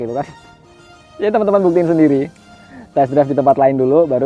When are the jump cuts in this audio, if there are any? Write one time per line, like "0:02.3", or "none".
none